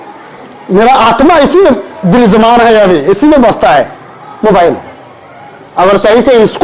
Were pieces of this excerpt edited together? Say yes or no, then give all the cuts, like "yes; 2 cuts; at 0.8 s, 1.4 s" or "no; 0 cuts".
no; 0 cuts